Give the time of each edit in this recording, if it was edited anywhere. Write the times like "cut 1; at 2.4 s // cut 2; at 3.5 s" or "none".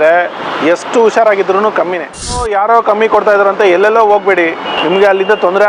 cut 1; at 2.4 s // cut 2; at 4.7 s